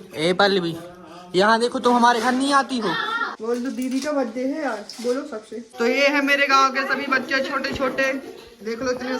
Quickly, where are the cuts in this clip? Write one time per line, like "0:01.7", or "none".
0:03.2
0:05.6